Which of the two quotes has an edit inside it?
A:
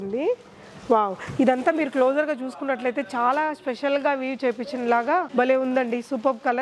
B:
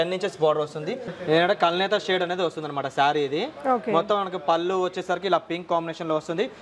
B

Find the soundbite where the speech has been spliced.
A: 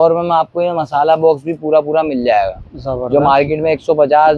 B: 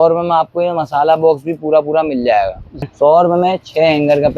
B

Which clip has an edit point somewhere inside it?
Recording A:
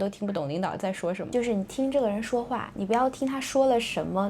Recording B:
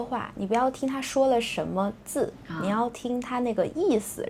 A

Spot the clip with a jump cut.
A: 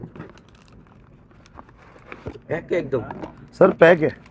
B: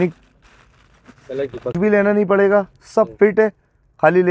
B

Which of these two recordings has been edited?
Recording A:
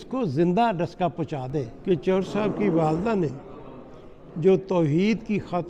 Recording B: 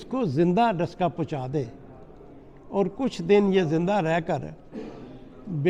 A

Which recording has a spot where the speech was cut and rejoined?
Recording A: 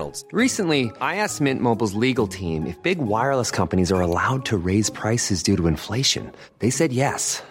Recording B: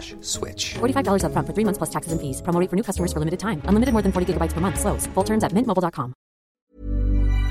B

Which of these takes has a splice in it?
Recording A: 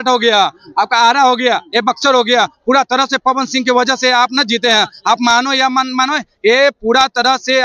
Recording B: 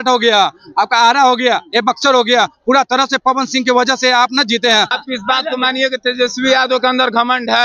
B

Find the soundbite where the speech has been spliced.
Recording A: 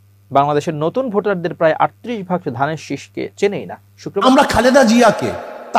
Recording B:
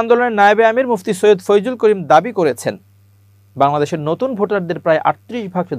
A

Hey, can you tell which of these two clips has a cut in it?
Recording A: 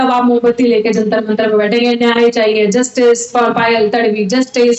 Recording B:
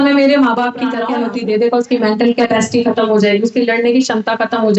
B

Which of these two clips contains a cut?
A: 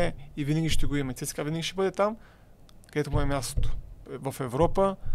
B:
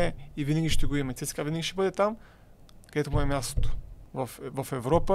A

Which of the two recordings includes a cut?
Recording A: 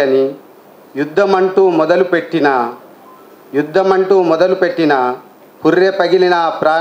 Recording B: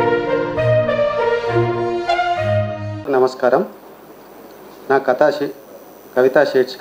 B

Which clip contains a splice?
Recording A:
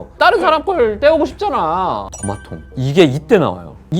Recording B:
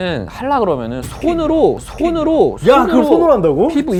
A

